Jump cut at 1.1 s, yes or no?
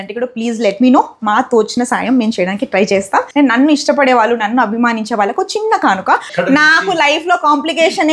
no